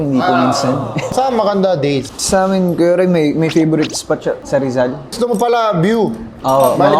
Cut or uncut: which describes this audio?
cut